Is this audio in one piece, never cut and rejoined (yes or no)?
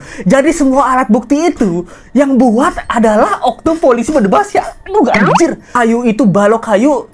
no